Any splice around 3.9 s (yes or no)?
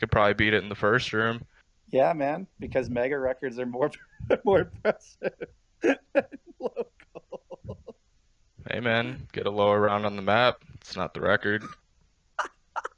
no